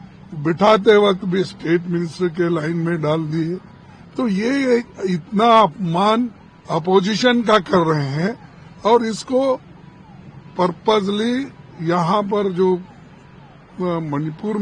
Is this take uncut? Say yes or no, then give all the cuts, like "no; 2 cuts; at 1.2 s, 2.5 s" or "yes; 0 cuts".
yes; 0 cuts